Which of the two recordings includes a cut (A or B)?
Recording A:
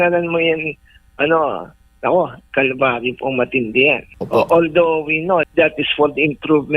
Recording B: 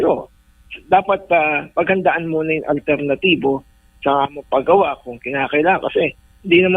A